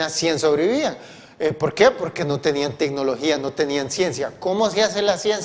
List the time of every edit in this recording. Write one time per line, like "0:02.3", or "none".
0:02.0